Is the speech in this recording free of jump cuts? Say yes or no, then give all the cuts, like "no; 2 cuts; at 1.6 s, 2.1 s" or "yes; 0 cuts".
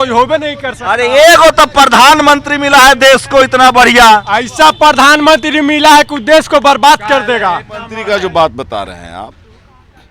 no; 1 cut; at 7.9 s